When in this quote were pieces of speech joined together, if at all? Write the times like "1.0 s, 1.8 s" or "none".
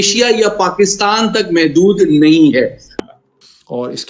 3.0 s